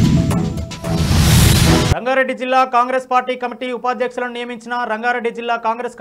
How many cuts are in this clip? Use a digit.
1